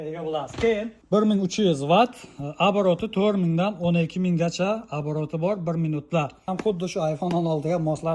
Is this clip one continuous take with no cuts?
no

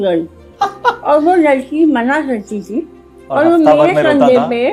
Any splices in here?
no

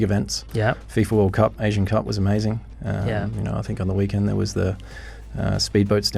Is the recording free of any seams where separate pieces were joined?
yes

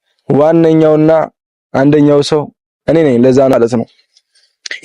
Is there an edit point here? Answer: yes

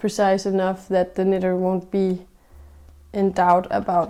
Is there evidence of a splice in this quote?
no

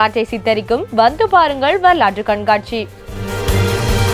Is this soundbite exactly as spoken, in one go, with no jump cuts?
no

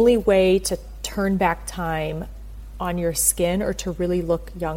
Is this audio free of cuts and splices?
yes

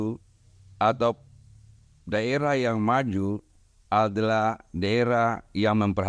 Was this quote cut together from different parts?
no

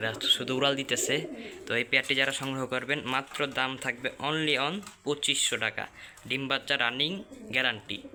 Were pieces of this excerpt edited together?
no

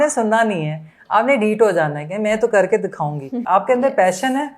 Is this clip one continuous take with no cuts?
no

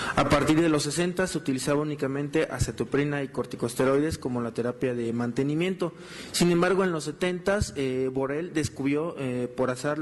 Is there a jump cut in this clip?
yes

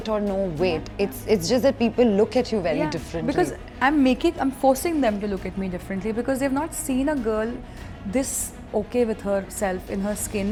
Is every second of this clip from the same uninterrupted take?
yes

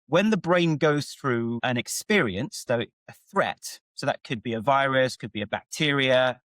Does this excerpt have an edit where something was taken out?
yes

